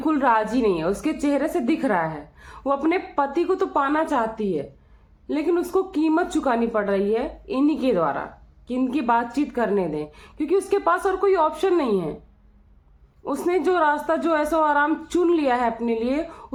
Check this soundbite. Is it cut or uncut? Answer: uncut